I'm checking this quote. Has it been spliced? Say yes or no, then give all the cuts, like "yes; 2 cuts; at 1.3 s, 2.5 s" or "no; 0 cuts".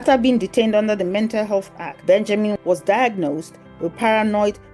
no; 0 cuts